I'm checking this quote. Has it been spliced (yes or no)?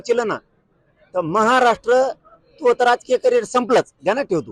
no